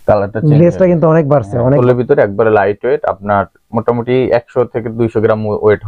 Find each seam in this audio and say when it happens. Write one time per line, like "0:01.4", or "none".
0:01.8